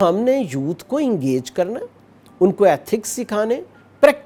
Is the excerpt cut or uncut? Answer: uncut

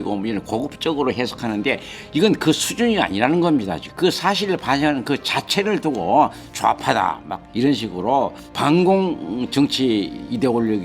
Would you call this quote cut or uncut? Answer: cut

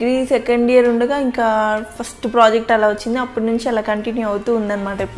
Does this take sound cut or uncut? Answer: uncut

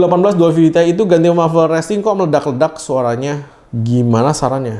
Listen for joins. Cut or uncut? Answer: uncut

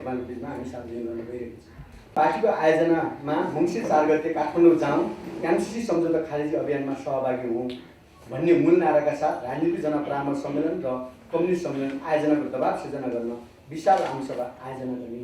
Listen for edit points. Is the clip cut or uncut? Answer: cut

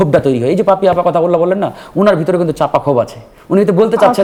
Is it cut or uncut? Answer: uncut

